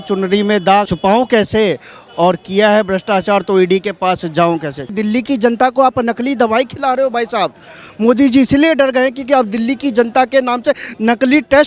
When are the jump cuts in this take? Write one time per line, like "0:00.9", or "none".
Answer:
0:00.9
0:04.8